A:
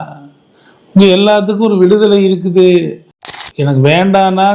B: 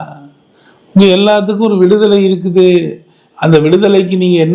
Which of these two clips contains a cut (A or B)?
A